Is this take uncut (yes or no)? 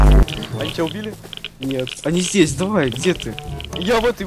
yes